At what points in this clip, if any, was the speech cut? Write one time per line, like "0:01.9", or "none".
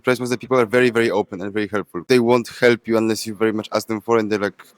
0:01.9